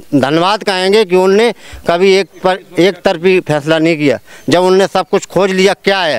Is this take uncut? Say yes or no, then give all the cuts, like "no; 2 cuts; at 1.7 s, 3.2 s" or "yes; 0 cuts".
yes; 0 cuts